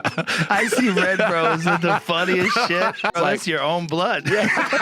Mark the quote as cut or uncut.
cut